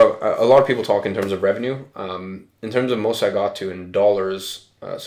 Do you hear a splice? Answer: no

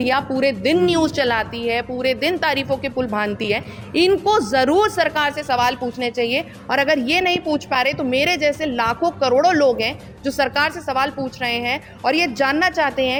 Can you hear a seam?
no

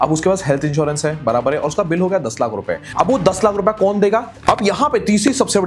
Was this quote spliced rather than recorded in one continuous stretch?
yes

